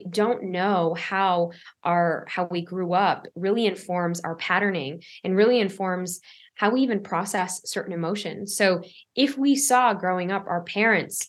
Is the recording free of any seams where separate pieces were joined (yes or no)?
yes